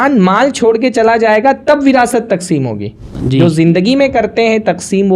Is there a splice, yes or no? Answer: yes